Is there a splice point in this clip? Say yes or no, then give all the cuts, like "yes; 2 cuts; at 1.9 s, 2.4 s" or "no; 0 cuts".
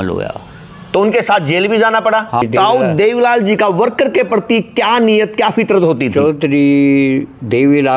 yes; 1 cut; at 2.4 s